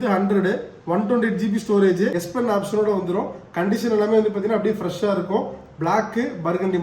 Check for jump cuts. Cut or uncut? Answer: cut